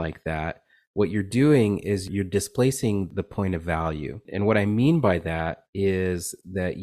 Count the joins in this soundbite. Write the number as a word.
three